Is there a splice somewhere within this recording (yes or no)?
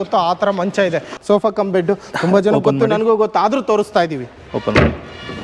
yes